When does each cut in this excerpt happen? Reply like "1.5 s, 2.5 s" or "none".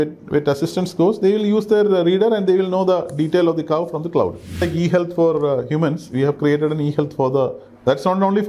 4.6 s